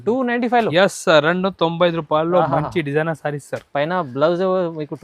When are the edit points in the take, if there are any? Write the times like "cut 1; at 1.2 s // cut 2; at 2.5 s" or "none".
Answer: none